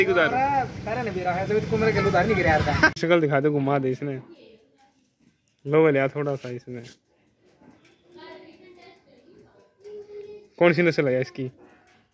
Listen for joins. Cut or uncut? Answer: cut